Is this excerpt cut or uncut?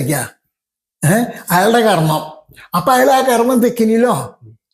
uncut